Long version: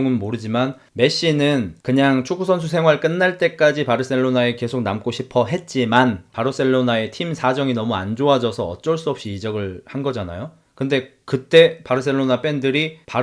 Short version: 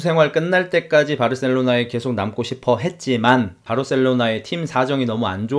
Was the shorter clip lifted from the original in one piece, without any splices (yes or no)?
yes